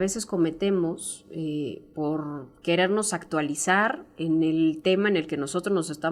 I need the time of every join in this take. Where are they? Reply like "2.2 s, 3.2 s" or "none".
none